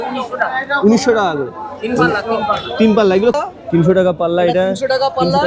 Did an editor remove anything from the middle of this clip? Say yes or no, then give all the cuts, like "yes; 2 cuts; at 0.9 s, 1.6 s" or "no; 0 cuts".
yes; 1 cut; at 3.4 s